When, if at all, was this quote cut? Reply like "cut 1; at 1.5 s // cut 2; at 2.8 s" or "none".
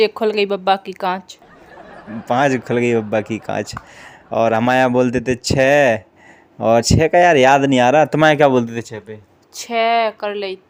none